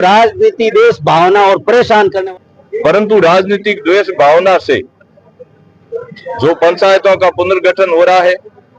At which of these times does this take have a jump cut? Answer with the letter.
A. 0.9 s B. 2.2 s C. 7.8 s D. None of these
B